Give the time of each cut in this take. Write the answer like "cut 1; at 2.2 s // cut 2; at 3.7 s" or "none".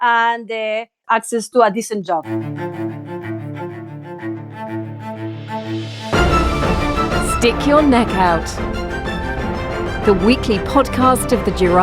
cut 1; at 1.0 s // cut 2; at 2.3 s